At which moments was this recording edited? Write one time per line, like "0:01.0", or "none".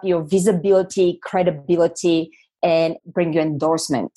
0:03.0